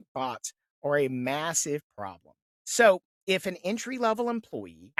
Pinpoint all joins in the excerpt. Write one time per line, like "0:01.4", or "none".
none